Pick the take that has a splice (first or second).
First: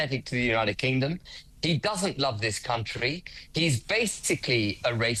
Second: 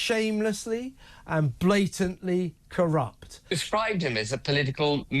second